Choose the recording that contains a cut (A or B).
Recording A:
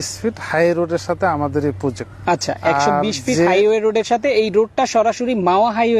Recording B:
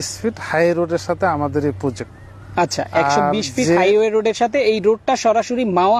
A